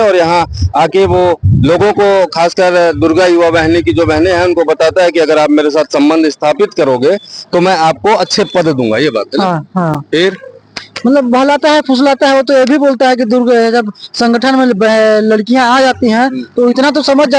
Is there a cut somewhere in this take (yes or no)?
no